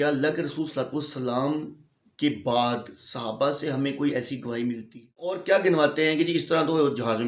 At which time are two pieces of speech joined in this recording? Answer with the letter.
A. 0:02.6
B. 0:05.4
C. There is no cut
B